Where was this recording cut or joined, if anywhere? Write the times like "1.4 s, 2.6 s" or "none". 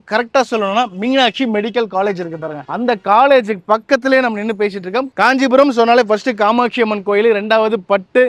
5.1 s